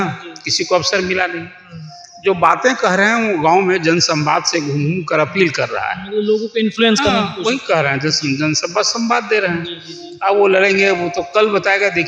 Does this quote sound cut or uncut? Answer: uncut